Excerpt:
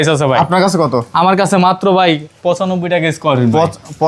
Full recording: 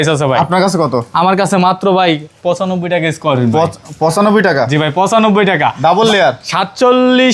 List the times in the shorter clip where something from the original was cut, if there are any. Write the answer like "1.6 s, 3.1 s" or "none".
none